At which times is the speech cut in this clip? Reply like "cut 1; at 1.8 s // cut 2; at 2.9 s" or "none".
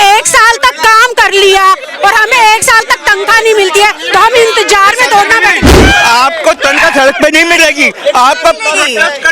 cut 1; at 5.8 s